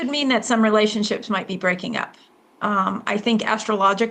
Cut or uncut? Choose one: uncut